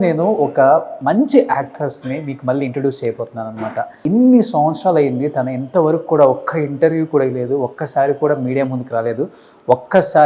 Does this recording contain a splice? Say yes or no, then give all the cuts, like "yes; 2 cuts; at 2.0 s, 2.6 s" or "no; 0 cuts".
yes; 2 cuts; at 0.9 s, 4.0 s